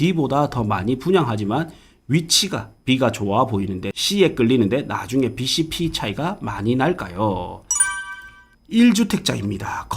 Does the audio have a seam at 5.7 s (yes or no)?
no